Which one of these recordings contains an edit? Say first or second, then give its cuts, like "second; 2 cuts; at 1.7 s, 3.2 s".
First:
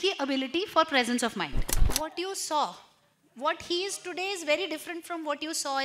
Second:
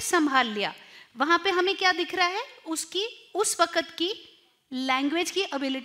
first; 1 cut; at 1.9 s